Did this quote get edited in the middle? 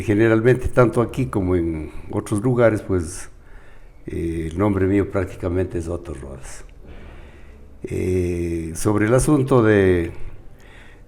no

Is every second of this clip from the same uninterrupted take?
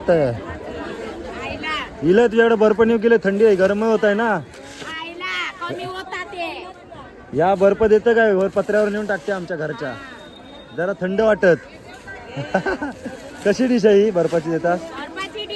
yes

